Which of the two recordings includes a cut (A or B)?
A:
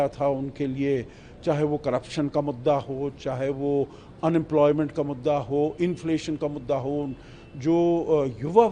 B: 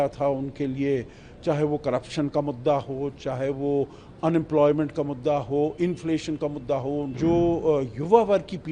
B